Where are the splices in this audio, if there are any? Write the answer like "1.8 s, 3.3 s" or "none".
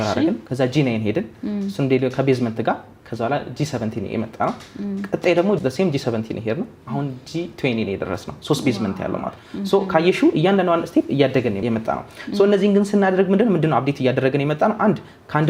none